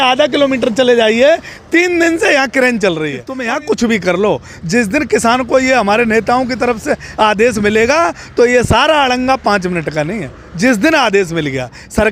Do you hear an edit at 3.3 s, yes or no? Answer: yes